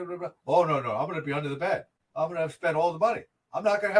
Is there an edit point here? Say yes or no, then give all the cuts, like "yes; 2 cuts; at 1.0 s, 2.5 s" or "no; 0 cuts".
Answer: yes; 1 cut; at 2.0 s